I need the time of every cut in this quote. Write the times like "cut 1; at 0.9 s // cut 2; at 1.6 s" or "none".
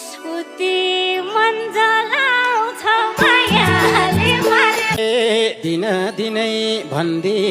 cut 1; at 5.0 s